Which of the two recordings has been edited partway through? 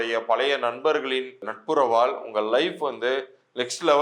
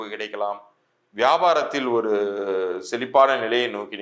first; 1 cut; at 1.5 s

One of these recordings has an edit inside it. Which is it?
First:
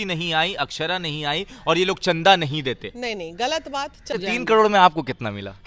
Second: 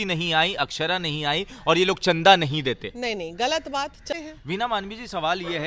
first; 1 cut; at 4.1 s

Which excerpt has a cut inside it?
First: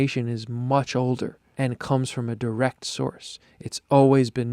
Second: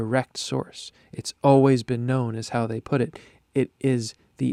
first; 1 cut; at 1.4 s

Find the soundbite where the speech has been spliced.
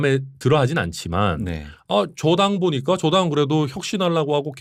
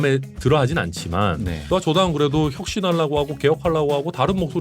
second; 1 cut; at 1.6 s

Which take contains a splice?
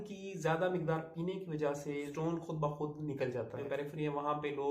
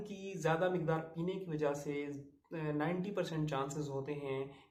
first; 2 cuts; at 2.1 s, 3.6 s

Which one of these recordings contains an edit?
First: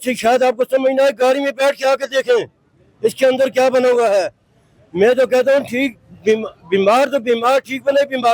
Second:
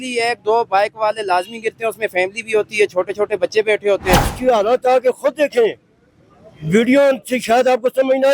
second; 1 cut; at 4.3 s

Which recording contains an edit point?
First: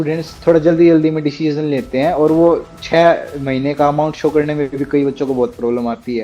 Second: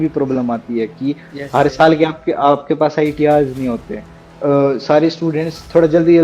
second; 1 cut; at 4.3 s

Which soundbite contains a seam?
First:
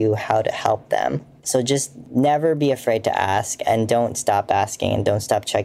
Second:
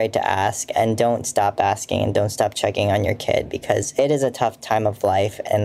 first; 1 cut; at 1.6 s

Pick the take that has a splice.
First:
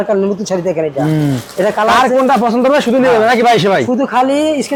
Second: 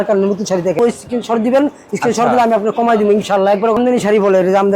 second; 2 cuts; at 0.8 s, 3.8 s

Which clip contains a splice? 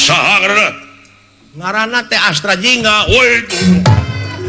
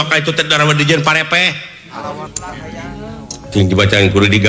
second; 1 cut; at 2.3 s

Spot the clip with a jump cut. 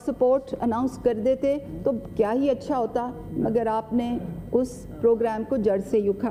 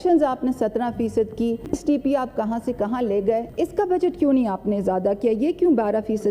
second; 2 cuts; at 1.7 s, 3.5 s

